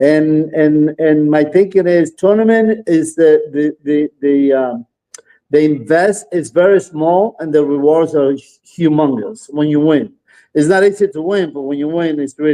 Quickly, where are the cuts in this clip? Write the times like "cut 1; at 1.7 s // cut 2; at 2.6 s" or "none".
none